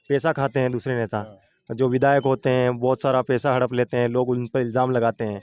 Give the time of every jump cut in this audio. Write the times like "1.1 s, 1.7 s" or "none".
none